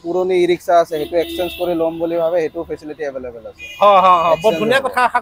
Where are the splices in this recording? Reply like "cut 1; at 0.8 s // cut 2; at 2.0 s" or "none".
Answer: none